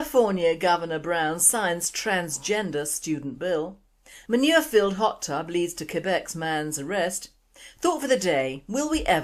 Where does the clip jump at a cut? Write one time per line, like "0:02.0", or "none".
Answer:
0:07.6